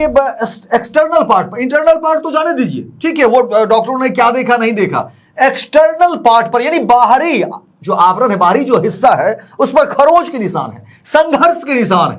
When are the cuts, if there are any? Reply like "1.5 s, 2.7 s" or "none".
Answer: none